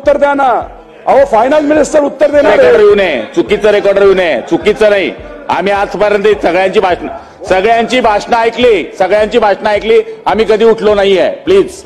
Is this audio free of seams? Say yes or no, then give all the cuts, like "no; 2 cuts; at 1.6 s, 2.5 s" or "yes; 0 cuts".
yes; 0 cuts